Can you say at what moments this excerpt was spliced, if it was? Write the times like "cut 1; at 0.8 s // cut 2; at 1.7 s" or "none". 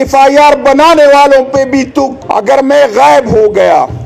cut 1; at 2.1 s